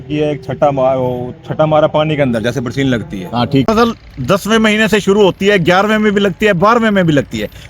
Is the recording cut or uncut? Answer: cut